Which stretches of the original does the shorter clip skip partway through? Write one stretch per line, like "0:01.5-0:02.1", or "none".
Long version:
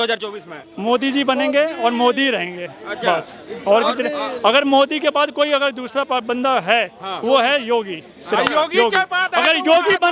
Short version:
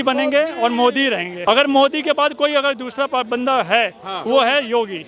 0:02.6-0:04.3